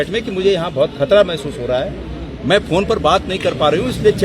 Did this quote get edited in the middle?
no; 0 cuts

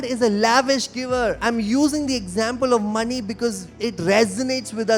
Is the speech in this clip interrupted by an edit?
yes; 1 cut; at 1.4 s

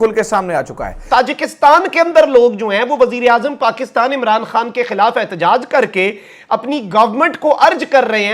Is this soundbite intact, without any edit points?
no; 1 cut; at 1.0 s

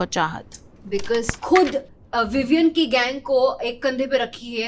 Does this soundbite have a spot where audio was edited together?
yes; 1 cut; at 1.3 s

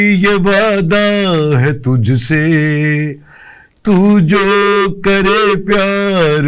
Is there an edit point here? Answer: no; 0 cuts

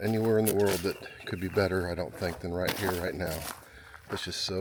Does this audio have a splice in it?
no; 0 cuts

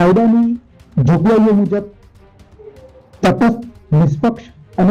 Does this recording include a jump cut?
no; 0 cuts

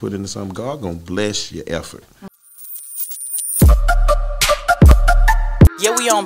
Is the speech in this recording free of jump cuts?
no; 1 cut; at 2.4 s

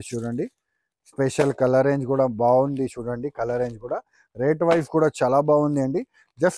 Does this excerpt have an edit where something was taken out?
no; 0 cuts

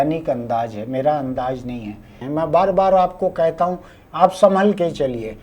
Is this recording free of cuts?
no; 1 cut; at 2.2 s

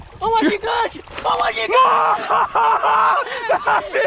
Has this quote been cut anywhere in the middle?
no; 0 cuts

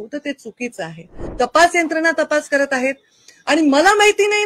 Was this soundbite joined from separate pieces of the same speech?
yes; 1 cut; at 1.2 s

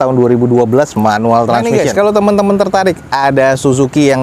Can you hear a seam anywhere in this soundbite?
yes; 1 cut; at 1.7 s

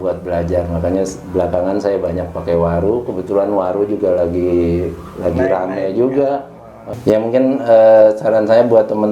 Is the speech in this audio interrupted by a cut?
yes; 1 cut; at 6.9 s

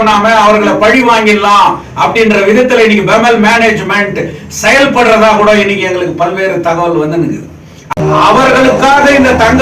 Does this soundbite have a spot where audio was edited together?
yes; 1 cut; at 7.9 s

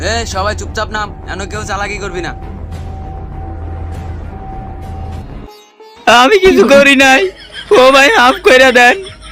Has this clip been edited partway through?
no; 0 cuts

